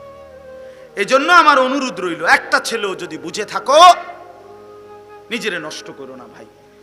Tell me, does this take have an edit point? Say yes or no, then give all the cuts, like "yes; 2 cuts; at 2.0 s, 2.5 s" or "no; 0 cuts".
yes; 1 cut; at 0.9 s